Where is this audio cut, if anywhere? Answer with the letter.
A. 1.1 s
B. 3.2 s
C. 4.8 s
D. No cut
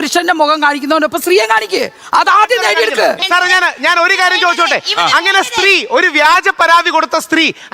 B